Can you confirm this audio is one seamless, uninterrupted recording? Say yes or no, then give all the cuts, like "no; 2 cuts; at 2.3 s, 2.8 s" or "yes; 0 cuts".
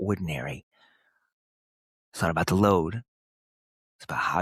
yes; 0 cuts